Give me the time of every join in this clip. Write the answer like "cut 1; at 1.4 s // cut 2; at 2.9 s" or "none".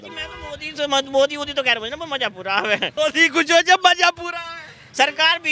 cut 1; at 2.9 s